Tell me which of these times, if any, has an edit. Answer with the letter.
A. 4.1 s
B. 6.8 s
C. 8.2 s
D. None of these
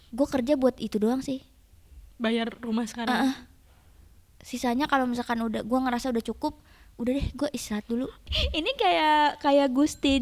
C